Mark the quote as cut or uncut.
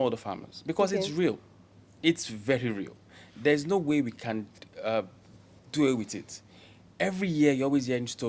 uncut